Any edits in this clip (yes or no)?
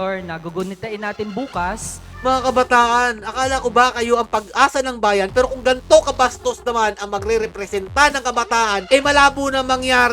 yes